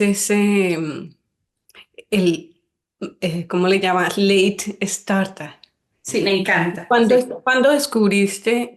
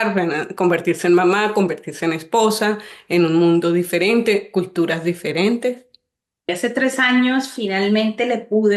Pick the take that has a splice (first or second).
second